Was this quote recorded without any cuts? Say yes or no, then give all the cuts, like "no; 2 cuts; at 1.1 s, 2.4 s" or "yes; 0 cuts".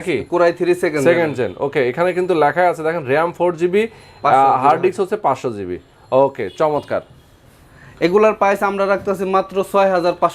yes; 0 cuts